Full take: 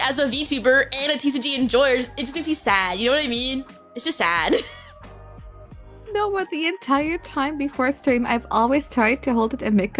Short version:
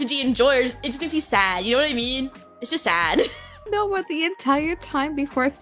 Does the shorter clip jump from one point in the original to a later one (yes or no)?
yes